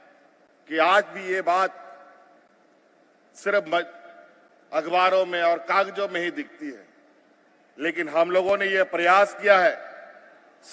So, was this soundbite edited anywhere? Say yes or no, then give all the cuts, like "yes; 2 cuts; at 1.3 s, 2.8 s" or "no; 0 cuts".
no; 0 cuts